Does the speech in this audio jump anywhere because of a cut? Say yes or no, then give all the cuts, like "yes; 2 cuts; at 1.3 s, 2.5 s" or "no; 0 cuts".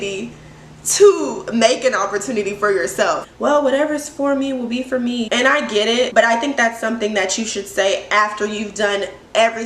yes; 2 cuts; at 3.3 s, 5.3 s